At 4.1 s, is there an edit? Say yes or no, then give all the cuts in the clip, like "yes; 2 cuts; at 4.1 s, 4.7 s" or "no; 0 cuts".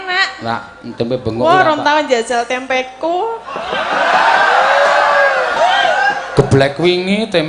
no; 1 cut; at 5.5 s